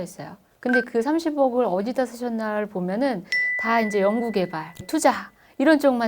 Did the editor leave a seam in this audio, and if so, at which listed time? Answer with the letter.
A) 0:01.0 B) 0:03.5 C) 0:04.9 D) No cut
C